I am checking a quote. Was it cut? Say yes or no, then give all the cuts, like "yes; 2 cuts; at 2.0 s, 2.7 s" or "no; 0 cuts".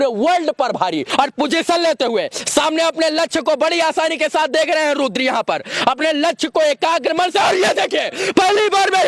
yes; 1 cut; at 1.0 s